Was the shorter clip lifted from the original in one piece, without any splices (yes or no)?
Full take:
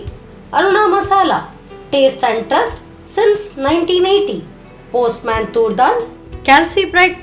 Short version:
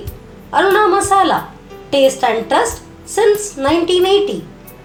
yes